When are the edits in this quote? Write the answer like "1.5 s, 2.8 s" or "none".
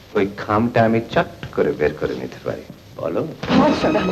2.8 s